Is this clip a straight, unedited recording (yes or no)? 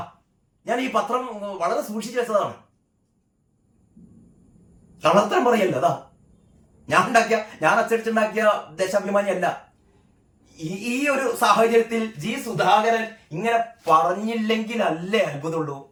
yes